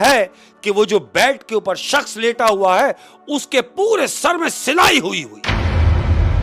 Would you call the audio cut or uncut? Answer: uncut